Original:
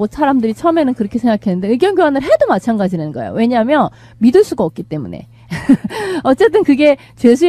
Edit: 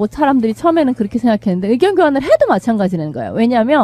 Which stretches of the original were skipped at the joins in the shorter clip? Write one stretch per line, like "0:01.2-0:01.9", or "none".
none